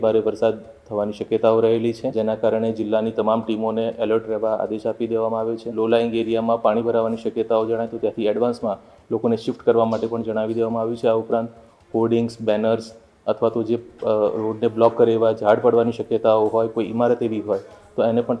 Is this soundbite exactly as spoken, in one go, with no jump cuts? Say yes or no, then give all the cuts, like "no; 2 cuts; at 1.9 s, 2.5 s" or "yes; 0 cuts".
no; 2 cuts; at 2.1 s, 5.7 s